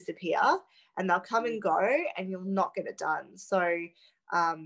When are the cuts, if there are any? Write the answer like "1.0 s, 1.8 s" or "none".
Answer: none